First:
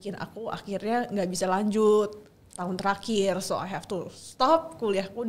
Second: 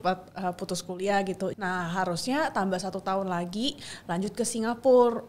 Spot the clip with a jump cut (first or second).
second